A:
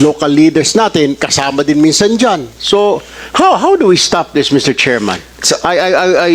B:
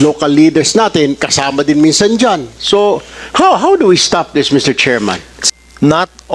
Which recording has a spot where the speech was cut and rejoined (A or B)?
B